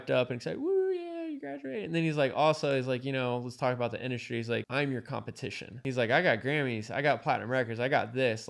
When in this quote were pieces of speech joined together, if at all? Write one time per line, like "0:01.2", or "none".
0:04.7
0:05.8